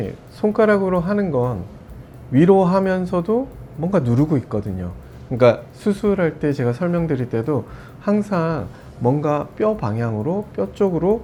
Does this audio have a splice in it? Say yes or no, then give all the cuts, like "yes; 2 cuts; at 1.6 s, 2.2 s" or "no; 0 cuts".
no; 0 cuts